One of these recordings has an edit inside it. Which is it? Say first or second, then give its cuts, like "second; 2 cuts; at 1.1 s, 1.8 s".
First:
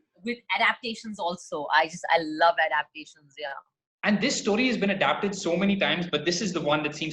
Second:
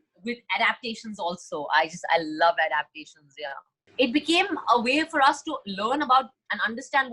second; 1 cut; at 3.8 s